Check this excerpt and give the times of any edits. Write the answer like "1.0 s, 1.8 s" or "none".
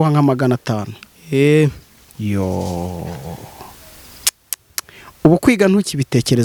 none